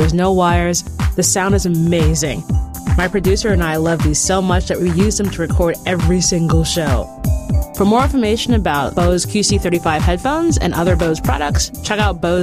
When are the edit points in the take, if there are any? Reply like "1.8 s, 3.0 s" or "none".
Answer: none